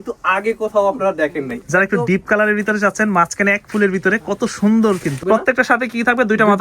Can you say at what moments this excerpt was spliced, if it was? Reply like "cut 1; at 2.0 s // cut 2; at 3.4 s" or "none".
cut 1; at 1.6 s // cut 2; at 5.2 s